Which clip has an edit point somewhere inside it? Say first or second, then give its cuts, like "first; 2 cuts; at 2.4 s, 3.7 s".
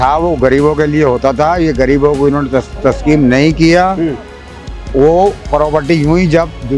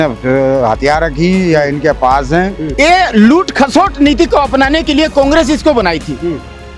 second; 1 cut; at 2.6 s